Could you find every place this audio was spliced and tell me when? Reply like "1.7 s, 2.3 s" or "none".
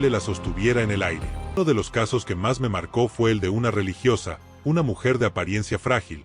1.6 s